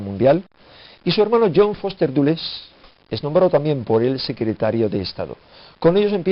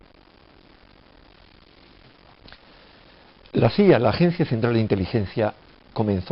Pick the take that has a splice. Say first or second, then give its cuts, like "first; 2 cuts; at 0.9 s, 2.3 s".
first; 1 cut; at 2.4 s